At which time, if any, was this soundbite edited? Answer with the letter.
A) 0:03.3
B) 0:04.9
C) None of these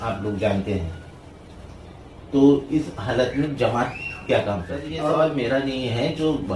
B